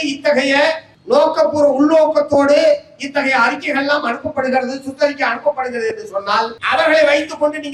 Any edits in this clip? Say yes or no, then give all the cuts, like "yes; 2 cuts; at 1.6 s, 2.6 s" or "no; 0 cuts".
yes; 2 cuts; at 0.9 s, 6.6 s